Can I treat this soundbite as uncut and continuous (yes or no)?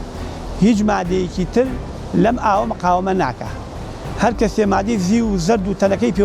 yes